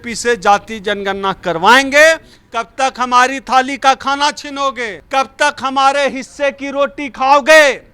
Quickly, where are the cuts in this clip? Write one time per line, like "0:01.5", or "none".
0:02.4
0:04.9